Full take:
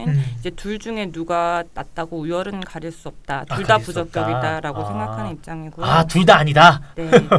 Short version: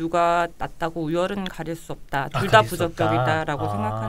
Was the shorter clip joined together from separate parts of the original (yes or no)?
no